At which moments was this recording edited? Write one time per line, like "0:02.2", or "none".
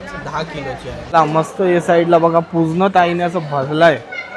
0:00.9